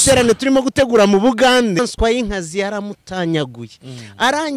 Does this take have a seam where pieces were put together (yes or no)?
yes